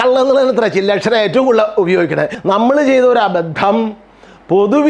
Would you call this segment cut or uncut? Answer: cut